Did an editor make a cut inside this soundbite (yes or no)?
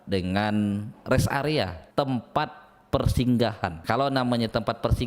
yes